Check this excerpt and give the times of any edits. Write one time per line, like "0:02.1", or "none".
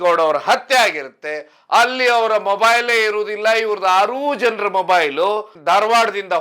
0:05.5